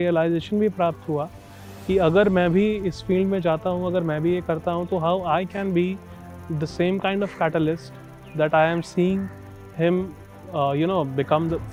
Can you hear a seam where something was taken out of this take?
no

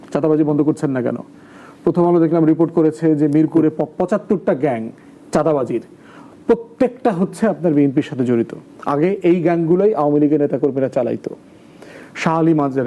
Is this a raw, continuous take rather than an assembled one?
yes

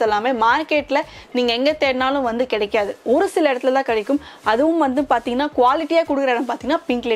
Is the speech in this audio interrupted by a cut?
no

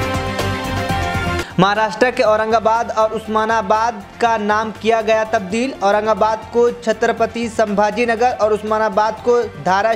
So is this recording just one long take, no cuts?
yes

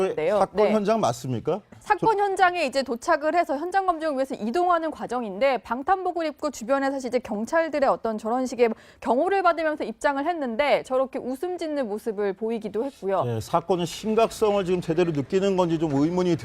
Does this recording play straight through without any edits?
no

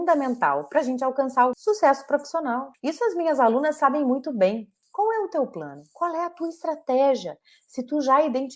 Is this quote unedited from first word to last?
no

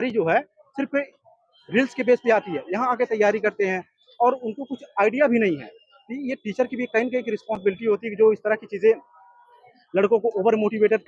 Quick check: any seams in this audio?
no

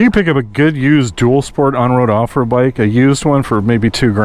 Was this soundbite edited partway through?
no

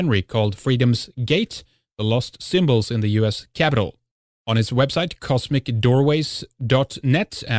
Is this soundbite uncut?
no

